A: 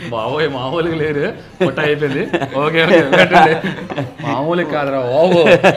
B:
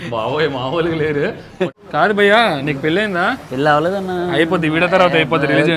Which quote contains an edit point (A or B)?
B